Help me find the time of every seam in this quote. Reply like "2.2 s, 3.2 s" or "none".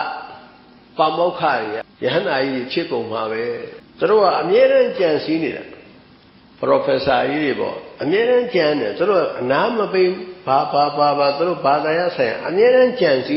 1.9 s, 3.8 s